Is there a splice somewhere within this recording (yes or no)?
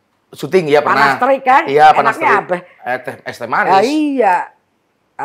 no